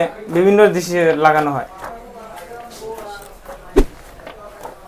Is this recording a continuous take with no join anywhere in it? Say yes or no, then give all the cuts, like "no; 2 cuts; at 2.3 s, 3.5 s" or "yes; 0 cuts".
yes; 0 cuts